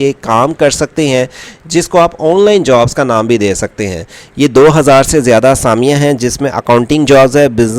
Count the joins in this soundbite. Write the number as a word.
zero